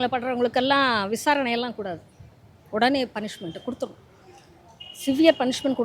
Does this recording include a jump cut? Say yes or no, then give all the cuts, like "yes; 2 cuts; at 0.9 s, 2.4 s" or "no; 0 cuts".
no; 0 cuts